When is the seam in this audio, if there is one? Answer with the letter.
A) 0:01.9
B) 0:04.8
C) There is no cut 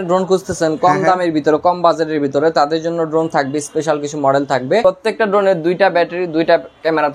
B